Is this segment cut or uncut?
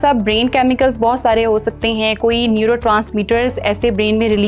uncut